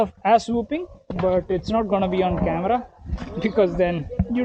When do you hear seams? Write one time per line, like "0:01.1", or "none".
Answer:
none